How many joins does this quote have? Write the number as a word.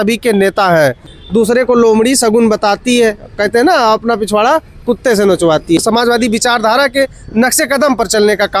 two